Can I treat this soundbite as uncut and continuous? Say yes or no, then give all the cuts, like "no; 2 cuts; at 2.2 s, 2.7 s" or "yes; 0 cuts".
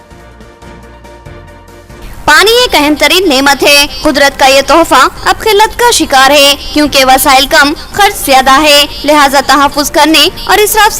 no; 1 cut; at 0.9 s